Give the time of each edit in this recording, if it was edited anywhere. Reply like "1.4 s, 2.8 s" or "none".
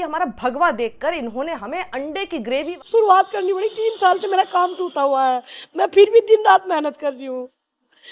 2.8 s